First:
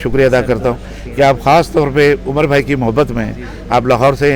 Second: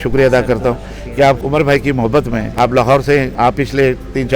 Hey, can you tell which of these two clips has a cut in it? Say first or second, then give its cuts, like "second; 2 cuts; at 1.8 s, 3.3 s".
second; 3 cuts; at 1.4 s, 2.5 s, 3.3 s